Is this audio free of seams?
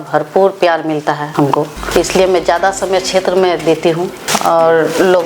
no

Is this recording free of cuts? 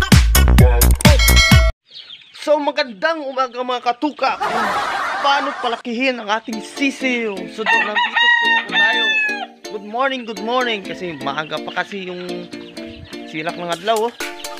no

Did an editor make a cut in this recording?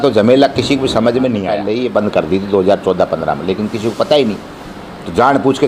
yes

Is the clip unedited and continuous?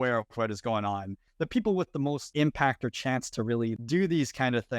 no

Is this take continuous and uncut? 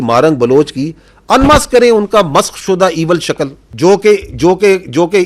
no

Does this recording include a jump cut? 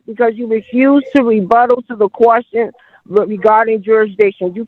no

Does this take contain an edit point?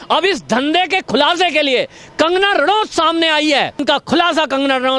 yes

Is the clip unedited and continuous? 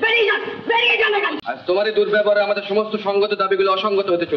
no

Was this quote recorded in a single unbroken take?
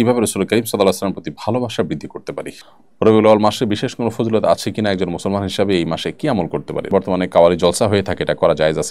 no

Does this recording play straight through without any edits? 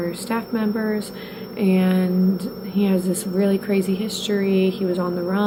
yes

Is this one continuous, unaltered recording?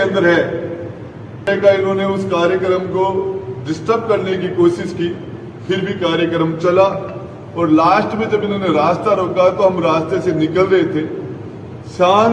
no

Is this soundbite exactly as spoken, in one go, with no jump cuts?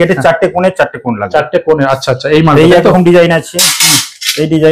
yes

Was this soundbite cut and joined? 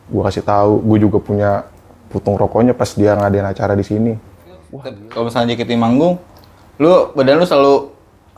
yes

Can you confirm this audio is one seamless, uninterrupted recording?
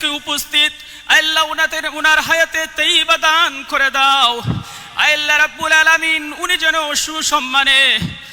yes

